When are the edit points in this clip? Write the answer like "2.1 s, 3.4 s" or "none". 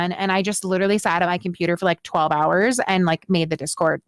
none